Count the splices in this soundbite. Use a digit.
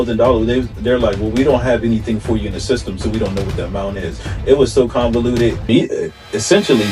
1